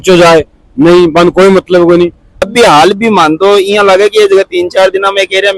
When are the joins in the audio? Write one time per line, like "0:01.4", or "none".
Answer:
0:02.3